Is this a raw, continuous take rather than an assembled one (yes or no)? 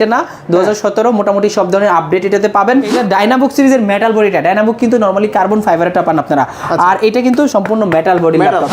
no